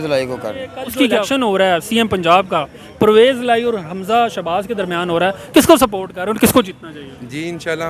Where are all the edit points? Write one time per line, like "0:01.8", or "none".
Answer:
0:01.2